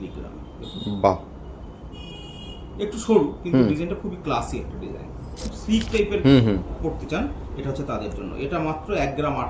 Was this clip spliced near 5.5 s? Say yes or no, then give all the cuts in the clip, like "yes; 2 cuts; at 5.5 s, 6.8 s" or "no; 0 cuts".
yes; 1 cut; at 5.5 s